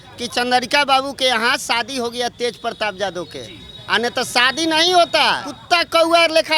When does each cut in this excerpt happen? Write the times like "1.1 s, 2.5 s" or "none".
5.5 s